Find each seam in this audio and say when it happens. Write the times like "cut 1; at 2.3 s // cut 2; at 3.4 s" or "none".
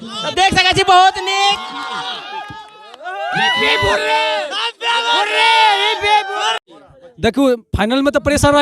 cut 1; at 6.6 s